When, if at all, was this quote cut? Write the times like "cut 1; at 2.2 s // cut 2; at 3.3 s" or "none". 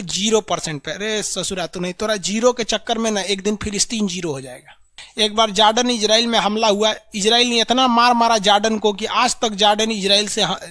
cut 1; at 5.0 s

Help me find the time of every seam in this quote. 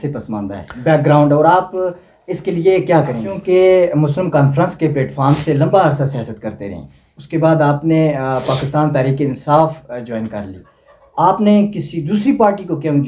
cut 1; at 3.3 s

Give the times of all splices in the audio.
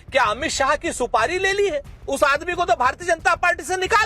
cut 1; at 2.0 s

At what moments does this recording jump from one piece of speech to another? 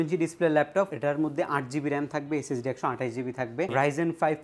cut 1; at 0.9 s // cut 2; at 3.7 s

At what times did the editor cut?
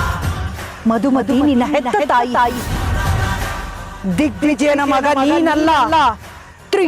cut 1; at 3.8 s

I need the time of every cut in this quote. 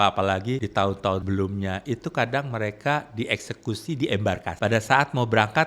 cut 1; at 1.0 s // cut 2; at 4.5 s

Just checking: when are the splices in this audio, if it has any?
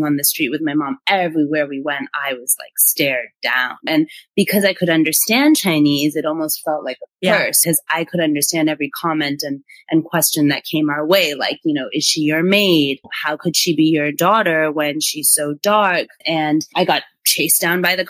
cut 1; at 3.9 s // cut 2; at 7.6 s // cut 3; at 13.1 s // cut 4; at 16.2 s

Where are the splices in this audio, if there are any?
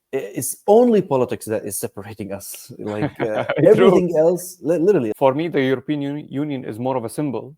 cut 1; at 5.1 s

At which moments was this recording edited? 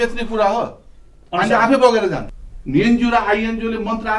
cut 1; at 2.3 s

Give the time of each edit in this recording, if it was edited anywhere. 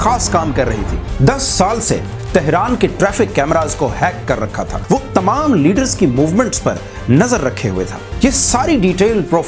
cut 1; at 1.1 s // cut 2; at 4.8 s // cut 3; at 8.0 s

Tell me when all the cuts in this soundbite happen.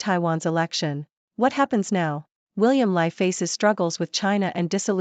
cut 1; at 2.3 s

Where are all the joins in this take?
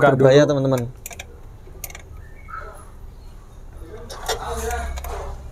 none

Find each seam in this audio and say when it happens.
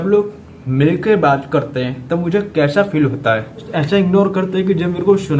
cut 1; at 3.7 s

